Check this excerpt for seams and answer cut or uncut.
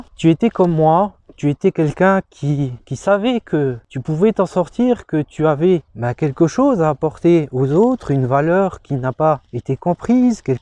uncut